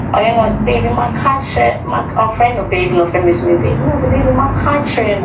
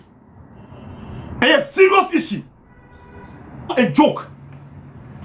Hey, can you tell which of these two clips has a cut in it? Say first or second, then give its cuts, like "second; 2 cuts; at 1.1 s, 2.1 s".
second; 1 cut; at 3.7 s